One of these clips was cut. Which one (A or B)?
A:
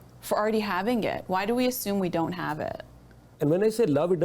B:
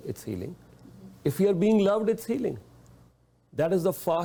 A